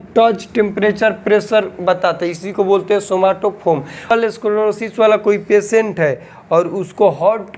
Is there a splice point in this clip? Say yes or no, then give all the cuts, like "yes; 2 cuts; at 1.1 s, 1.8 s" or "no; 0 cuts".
yes; 1 cut; at 4.1 s